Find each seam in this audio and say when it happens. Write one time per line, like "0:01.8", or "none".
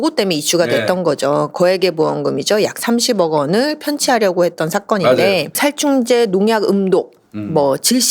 0:05.5